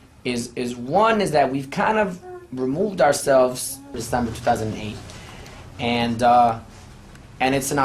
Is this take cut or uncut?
uncut